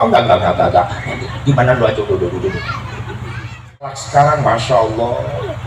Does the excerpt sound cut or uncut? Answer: cut